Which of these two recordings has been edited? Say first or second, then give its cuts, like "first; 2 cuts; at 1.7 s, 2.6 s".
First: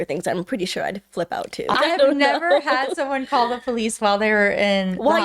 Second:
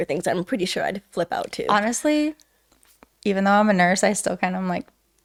first; 1 cut; at 1.7 s